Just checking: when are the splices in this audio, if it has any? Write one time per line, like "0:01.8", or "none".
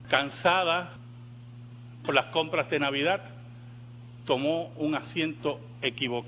0:03.3